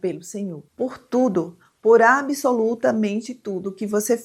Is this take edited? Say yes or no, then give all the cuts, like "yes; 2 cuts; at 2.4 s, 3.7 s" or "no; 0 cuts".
no; 0 cuts